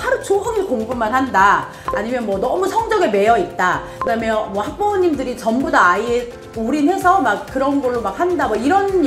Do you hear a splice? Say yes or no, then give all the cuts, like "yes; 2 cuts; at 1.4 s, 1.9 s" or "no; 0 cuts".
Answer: no; 0 cuts